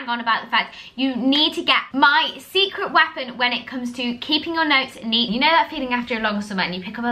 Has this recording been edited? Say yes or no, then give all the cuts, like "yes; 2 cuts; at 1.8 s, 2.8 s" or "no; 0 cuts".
yes; 2 cuts; at 1.9 s, 5.3 s